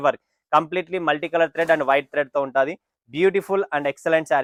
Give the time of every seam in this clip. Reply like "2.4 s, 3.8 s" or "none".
none

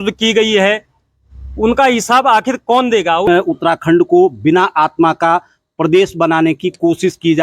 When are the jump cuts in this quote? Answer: 3.3 s

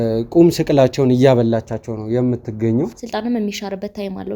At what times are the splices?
3.0 s

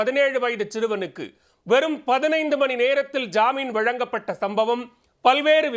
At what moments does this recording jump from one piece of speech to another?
none

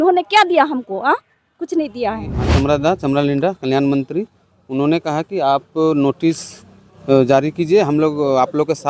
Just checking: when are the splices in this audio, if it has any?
2.4 s

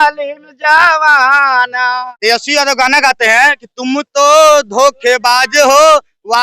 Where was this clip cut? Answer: 2.1 s

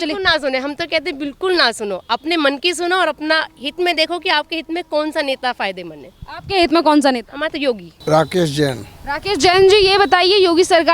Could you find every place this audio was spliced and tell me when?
none

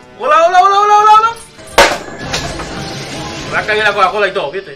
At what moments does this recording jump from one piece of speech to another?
1.5 s

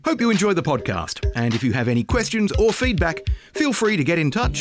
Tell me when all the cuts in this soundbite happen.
none

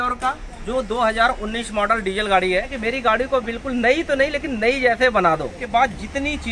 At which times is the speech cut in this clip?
2.7 s, 5.6 s

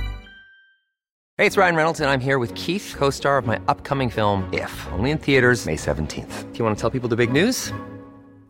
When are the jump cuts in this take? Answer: 1.2 s

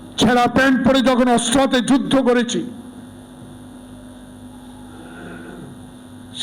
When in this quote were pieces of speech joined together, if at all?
none

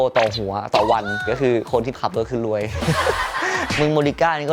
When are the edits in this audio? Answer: 1.2 s, 3.6 s

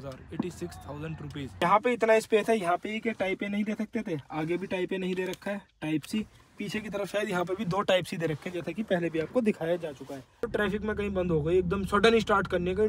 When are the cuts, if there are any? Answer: 1.6 s, 10.4 s

